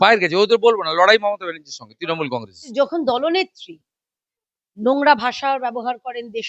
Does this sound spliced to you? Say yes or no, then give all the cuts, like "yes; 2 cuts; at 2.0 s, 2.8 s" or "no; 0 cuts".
yes; 1 cut; at 2.7 s